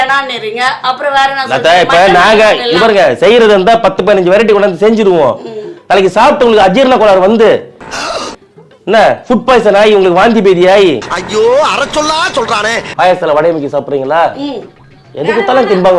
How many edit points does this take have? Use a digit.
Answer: 1